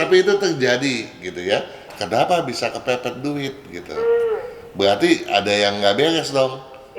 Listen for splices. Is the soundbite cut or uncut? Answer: cut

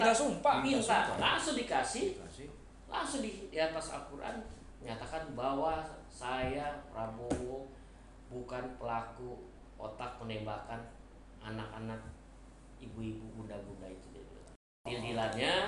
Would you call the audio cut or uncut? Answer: cut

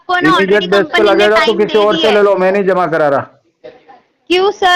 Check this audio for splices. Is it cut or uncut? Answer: uncut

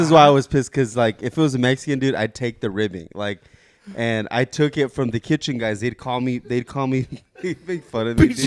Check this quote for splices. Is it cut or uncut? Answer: uncut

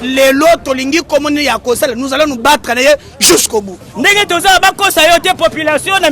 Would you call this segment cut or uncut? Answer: cut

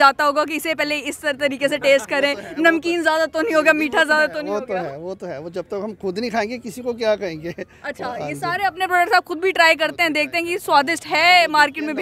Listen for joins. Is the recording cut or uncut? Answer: uncut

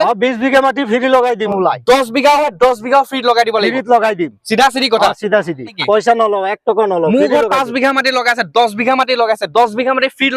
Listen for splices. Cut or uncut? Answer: cut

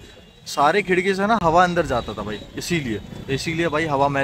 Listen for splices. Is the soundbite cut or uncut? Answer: uncut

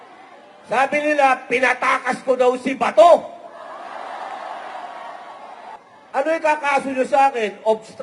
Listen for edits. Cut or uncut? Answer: cut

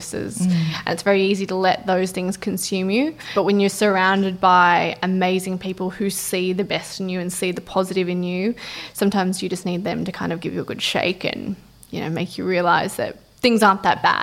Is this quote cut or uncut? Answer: cut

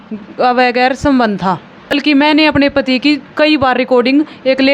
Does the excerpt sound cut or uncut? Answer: cut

